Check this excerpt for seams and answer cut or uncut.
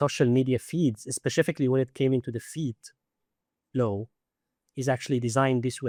uncut